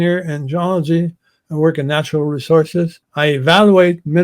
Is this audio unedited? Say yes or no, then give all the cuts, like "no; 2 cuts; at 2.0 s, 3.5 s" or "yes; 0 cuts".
no; 1 cut; at 3.0 s